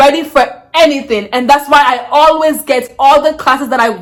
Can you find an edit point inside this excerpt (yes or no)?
no